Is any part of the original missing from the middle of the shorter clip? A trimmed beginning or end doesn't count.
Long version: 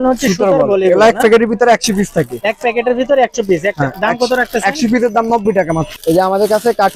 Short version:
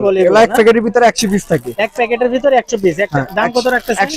no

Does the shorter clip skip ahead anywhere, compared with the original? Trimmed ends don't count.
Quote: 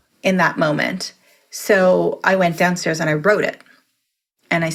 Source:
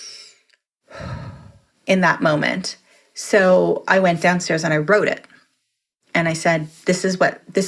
no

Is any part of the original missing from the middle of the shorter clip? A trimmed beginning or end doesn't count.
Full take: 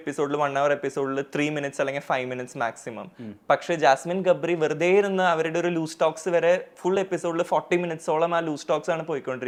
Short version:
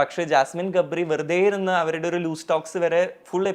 no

